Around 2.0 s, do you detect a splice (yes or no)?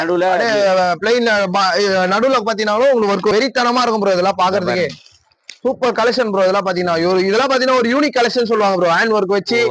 no